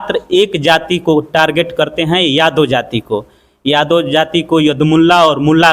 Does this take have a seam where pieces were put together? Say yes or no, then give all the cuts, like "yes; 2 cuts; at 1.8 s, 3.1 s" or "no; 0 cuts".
no; 0 cuts